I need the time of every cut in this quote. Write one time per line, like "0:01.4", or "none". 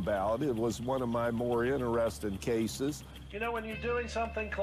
0:03.1